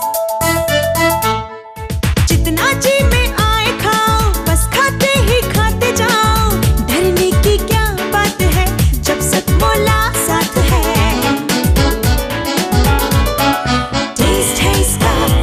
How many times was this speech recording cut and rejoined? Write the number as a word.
zero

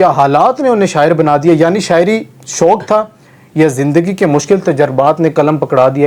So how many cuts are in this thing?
zero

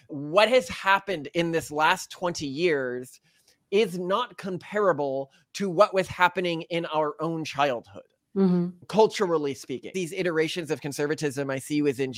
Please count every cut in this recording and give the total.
one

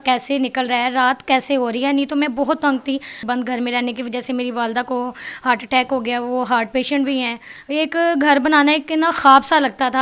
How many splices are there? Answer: two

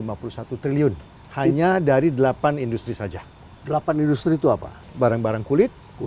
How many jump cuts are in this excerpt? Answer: zero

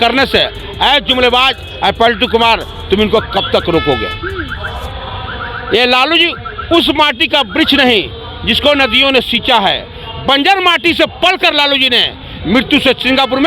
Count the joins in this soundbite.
zero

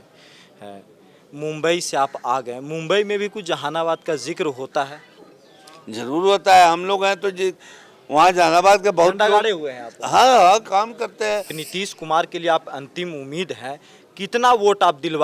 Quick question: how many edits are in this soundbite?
one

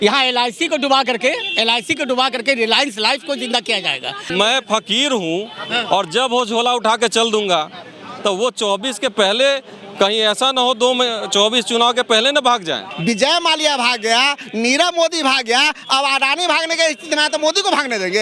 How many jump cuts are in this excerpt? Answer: two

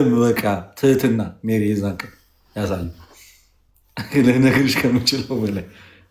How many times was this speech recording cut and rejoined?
zero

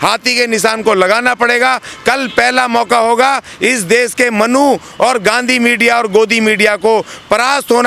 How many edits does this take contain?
zero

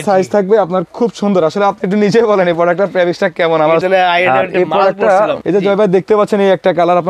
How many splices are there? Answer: two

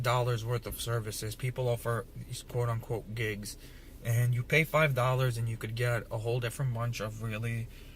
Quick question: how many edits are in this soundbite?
one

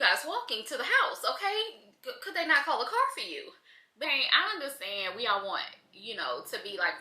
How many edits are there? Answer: one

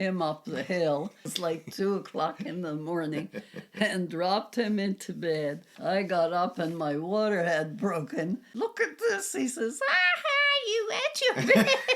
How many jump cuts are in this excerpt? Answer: three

